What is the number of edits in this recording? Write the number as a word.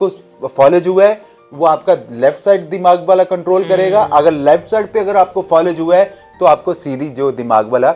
zero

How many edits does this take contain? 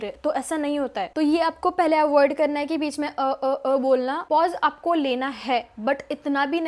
two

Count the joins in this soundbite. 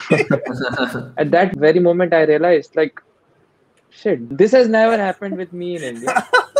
two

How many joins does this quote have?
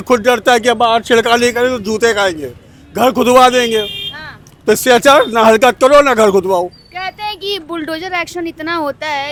zero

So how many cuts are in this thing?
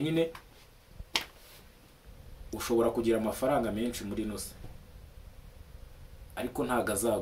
one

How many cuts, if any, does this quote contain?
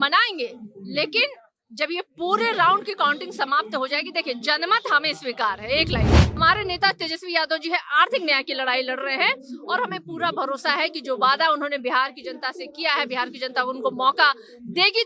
one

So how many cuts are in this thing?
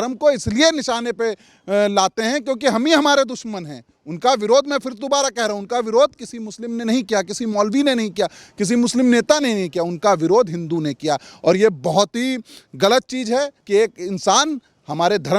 one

